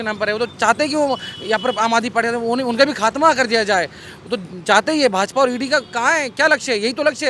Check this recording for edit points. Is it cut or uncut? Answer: uncut